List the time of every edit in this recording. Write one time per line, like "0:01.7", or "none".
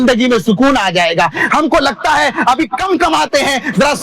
none